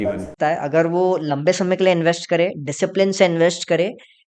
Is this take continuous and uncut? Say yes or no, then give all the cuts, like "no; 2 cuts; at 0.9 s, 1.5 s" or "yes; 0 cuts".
yes; 0 cuts